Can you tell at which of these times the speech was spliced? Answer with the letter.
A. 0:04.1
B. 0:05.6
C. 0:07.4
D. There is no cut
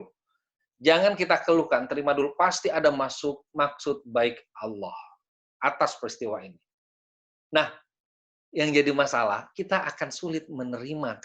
D